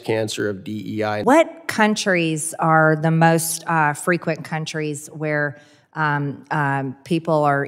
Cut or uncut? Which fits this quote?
cut